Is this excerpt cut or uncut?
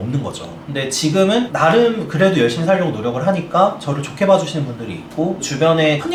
uncut